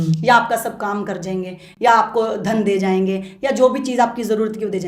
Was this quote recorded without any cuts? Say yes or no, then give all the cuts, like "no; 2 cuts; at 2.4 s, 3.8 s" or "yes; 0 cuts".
yes; 0 cuts